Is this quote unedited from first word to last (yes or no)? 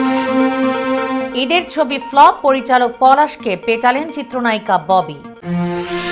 no